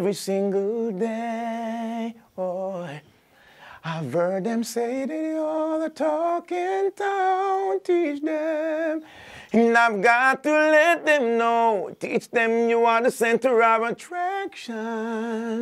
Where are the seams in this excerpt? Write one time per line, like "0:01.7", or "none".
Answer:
none